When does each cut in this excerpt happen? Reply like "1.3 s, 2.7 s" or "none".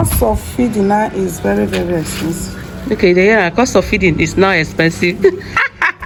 none